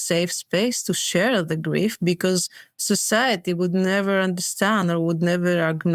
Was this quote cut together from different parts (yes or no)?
no